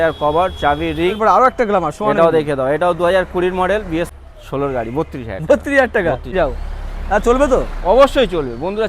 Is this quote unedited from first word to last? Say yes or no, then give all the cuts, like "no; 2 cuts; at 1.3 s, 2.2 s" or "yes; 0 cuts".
no; 3 cuts; at 1.2 s, 4.1 s, 6.3 s